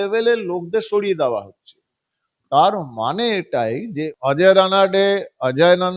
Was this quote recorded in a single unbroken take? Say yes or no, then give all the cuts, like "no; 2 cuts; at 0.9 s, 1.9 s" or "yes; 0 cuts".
no; 1 cut; at 3.9 s